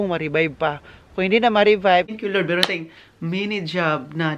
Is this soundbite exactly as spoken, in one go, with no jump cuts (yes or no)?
no